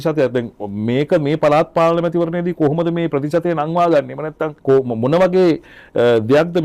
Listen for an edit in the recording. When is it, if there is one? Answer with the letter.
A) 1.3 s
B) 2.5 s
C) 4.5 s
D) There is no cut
C